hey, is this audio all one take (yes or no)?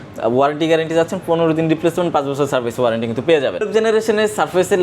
no